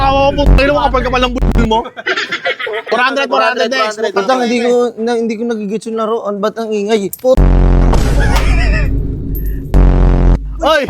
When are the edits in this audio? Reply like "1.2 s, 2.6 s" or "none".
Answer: 2.9 s